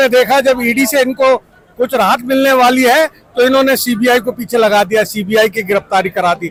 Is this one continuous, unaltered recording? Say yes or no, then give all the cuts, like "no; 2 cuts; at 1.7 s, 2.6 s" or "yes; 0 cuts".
yes; 0 cuts